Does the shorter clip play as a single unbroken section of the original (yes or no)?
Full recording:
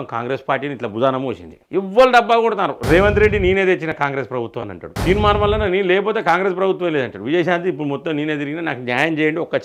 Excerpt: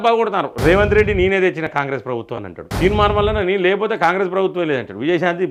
yes